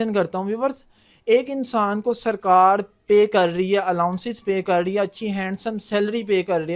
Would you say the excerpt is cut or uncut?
uncut